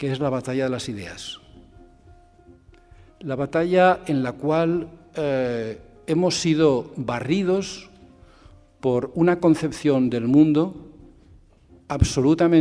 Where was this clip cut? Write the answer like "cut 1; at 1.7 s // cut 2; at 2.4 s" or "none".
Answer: none